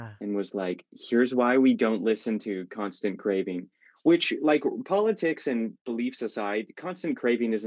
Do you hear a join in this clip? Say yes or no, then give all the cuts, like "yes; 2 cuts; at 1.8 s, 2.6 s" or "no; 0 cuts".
no; 0 cuts